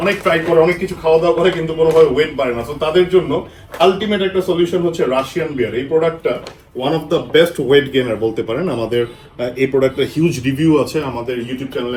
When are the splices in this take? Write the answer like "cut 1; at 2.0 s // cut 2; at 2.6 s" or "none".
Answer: none

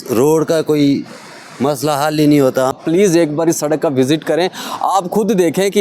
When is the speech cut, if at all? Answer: cut 1; at 2.8 s

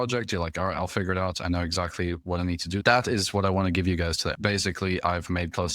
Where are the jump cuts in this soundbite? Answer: cut 1; at 2.8 s // cut 2; at 4.3 s

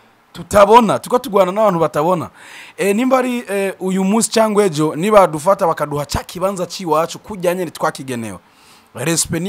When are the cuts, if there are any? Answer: none

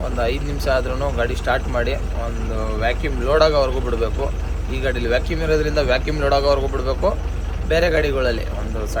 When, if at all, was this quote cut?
none

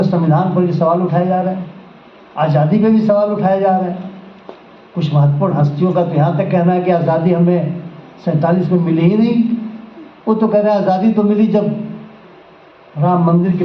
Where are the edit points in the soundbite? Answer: none

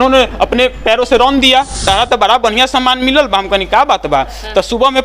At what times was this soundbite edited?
cut 1; at 1.8 s

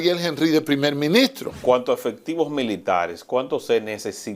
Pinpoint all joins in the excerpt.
cut 1; at 1.6 s

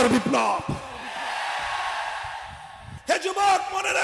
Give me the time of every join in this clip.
cut 1; at 2.9 s

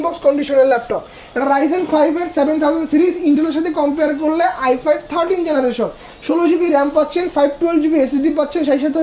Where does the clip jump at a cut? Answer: none

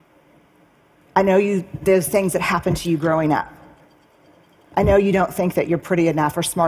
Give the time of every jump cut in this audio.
none

